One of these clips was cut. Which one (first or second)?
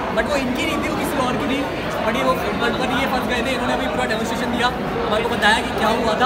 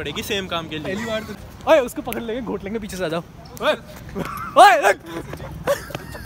second